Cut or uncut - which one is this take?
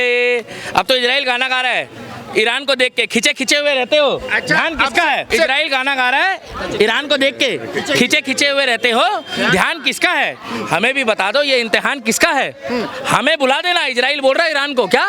cut